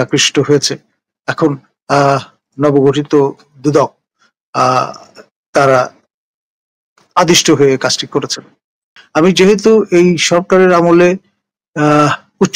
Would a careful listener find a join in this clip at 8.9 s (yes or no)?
yes